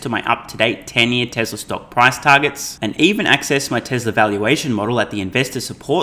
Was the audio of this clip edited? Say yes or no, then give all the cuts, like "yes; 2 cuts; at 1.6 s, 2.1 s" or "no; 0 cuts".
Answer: no; 0 cuts